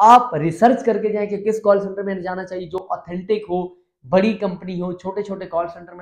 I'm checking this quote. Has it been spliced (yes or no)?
no